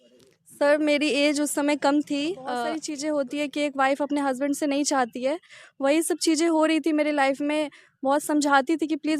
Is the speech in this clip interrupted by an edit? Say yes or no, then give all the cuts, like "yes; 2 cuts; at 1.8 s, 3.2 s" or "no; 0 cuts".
yes; 1 cut; at 2.9 s